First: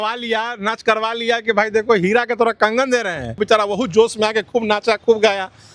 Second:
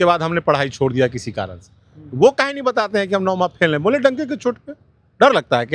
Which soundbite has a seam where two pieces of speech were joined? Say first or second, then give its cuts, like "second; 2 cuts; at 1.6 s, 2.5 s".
first; 1 cut; at 3.4 s